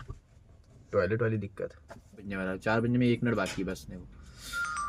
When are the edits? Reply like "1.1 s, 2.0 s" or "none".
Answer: 2.3 s